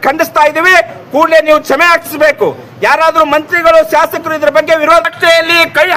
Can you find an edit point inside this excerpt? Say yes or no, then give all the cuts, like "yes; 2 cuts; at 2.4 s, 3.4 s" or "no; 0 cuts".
yes; 1 cut; at 5.1 s